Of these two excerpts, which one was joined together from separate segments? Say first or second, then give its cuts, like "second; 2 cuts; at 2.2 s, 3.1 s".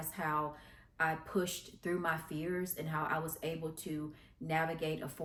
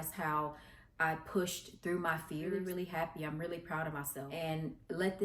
second; 2 cuts; at 2.6 s, 4.2 s